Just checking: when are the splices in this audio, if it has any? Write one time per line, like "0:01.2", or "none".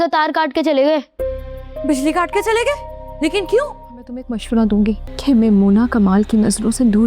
0:04.3
0:05.1